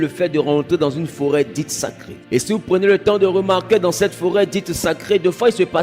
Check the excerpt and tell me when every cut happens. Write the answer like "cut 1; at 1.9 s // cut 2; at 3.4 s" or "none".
cut 1; at 2.1 s